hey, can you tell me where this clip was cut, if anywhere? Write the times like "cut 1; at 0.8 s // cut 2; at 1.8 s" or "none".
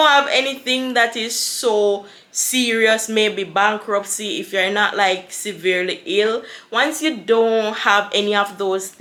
none